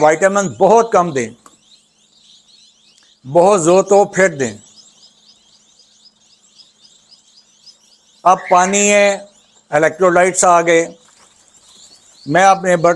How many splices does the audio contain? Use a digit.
0